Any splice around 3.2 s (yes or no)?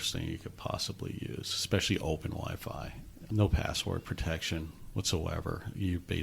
yes